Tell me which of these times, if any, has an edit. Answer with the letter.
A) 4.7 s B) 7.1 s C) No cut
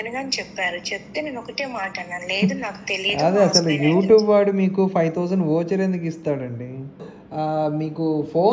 B